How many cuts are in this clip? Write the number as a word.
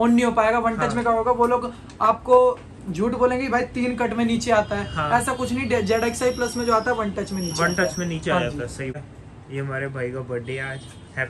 one